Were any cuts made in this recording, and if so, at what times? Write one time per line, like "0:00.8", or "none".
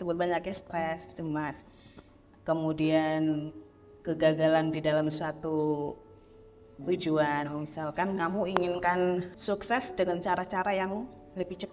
0:09.3